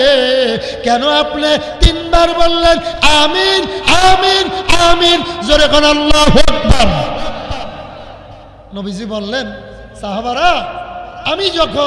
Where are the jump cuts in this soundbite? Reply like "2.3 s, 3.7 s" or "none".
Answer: none